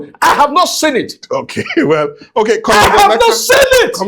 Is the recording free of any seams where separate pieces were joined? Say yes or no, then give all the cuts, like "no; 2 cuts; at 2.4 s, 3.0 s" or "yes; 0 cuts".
yes; 0 cuts